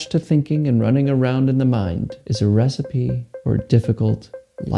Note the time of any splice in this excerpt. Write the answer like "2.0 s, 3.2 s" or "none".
2.2 s, 3.3 s